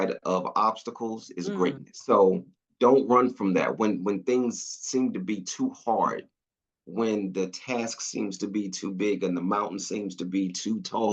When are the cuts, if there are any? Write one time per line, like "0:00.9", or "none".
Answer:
0:01.9